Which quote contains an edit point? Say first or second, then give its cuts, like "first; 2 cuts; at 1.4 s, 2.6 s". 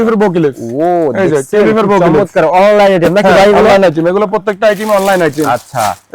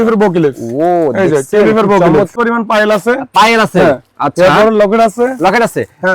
second; 1 cut; at 2.3 s